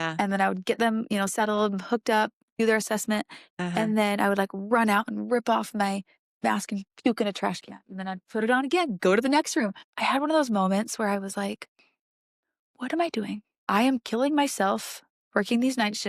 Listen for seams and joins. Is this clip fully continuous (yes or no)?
no